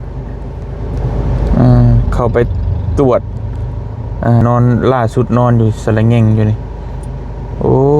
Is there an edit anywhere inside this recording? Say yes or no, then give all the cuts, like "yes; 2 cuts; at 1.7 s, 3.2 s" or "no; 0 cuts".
yes; 1 cut; at 4.4 s